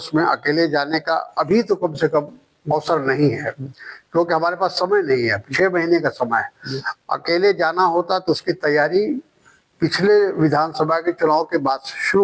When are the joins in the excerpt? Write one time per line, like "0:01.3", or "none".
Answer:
none